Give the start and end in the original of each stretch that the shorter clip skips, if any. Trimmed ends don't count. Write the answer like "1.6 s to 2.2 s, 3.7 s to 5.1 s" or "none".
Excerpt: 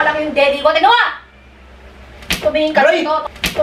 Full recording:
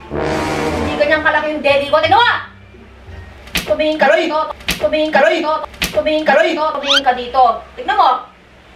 3.5 s to 4.6 s